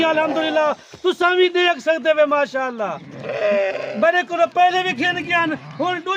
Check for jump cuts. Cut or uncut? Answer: uncut